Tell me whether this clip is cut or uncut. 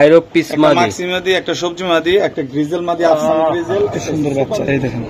cut